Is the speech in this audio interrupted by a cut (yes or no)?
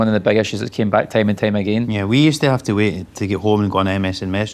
yes